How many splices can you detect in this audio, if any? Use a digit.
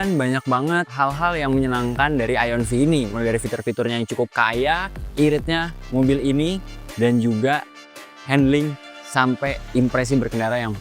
2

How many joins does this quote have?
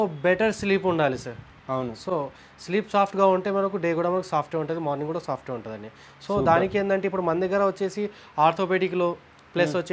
0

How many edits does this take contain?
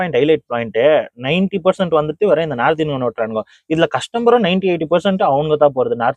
0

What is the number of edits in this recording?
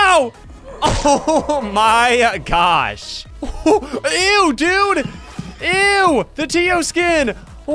1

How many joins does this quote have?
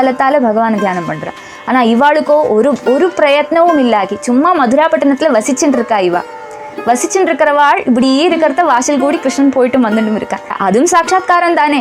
1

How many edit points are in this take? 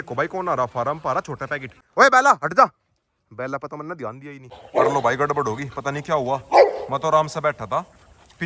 2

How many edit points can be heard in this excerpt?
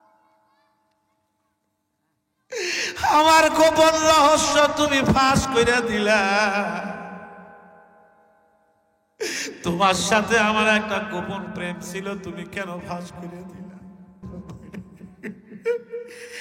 1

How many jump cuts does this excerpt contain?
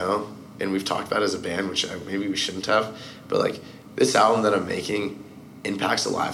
0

